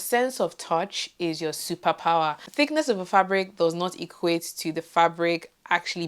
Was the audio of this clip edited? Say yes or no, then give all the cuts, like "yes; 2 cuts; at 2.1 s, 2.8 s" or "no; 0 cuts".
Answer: yes; 1 cut; at 2.4 s